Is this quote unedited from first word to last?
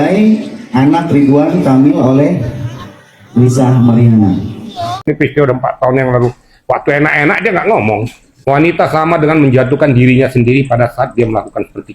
no; 1 cut; at 5.1 s

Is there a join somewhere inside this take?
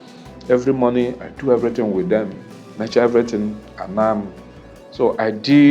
no; 0 cuts

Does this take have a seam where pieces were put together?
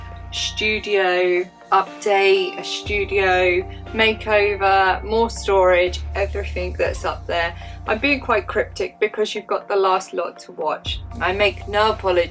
no; 0 cuts

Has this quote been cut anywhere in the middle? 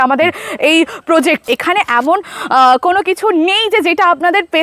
yes; 1 cut; at 1.4 s

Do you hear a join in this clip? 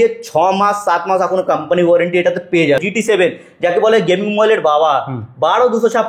yes; 1 cut; at 2.8 s

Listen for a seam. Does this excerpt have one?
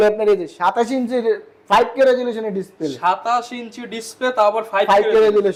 no; 0 cuts

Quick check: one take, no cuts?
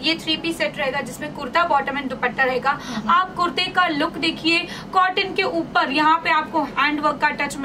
yes; 0 cuts

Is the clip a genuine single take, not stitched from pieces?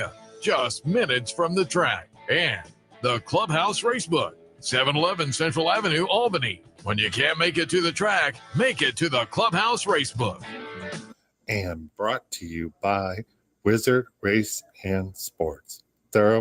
no; 1 cut; at 11.0 s

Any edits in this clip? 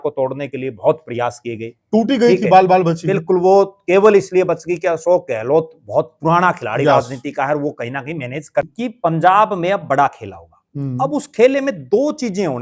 yes; 1 cut; at 8.6 s

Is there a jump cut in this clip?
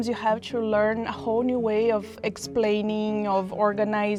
no; 0 cuts

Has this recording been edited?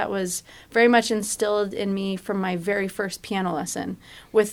no; 0 cuts

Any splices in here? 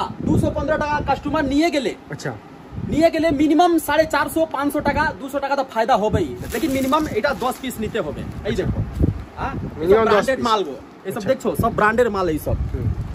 yes; 1 cut; at 6.4 s

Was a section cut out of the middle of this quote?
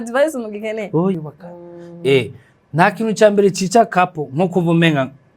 yes; 1 cut; at 1.2 s

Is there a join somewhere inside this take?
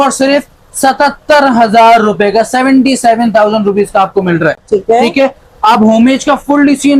no; 0 cuts

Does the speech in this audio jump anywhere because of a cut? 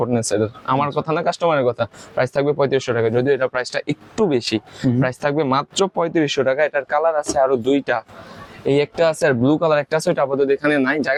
no; 0 cuts

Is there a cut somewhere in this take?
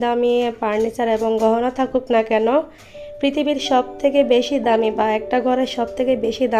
no; 0 cuts

